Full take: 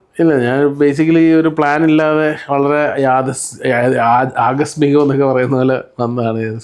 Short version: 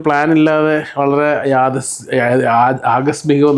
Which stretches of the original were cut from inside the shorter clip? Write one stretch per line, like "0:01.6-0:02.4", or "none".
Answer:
none

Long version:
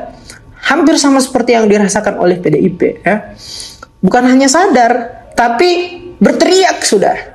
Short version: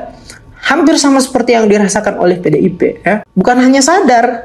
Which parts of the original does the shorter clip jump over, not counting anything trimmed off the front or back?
0:03.3-0:03.9

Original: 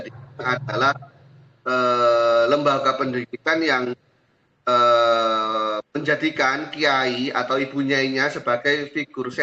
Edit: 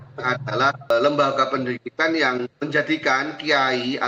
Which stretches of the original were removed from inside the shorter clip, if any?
0:01.1-0:02.4
0:04.0-0:05.9

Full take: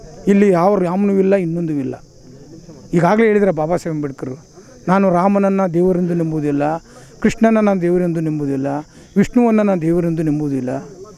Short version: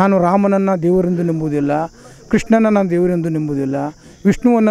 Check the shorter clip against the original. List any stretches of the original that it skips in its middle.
none

